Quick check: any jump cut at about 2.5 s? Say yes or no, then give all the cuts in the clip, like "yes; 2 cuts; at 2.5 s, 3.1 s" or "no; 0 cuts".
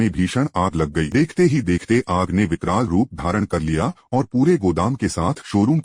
no; 1 cut; at 1.1 s